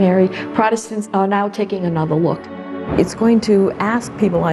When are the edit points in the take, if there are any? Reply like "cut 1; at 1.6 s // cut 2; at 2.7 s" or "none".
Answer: cut 1; at 1.1 s // cut 2; at 2.9 s

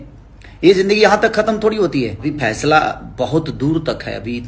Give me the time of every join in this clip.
cut 1; at 2.3 s

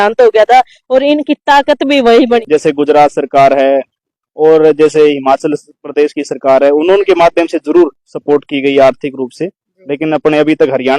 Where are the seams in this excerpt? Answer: cut 1; at 2.4 s

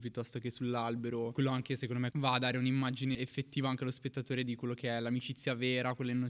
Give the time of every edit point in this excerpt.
cut 1; at 1.3 s // cut 2; at 2.1 s // cut 3; at 3.1 s

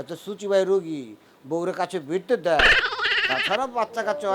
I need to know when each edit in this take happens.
none

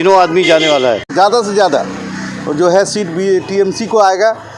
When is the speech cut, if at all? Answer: cut 1; at 1.1 s

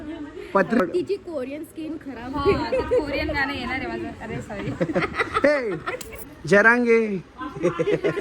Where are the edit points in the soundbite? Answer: cut 1; at 0.8 s // cut 2; at 6.1 s

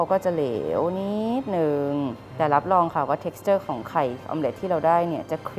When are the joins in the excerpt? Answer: none

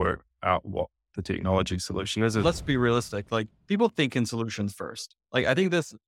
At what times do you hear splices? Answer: cut 1; at 2.4 s

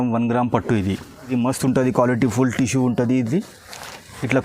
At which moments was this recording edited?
cut 1; at 1.3 s

